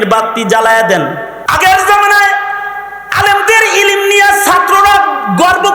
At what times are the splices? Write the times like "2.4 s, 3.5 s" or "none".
1.3 s